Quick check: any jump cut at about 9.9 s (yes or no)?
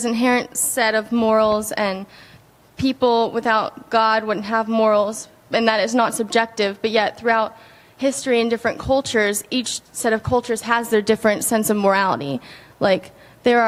no